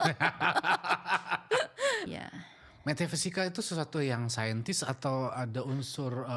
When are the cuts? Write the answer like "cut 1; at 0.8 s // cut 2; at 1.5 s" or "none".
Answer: cut 1; at 2.1 s